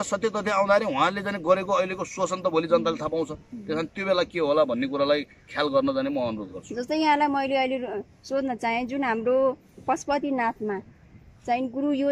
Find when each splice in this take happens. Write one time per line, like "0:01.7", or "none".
none